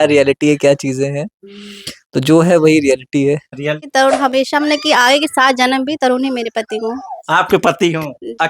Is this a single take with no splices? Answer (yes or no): no